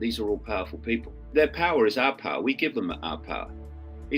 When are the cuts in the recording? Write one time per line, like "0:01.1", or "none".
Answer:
0:01.2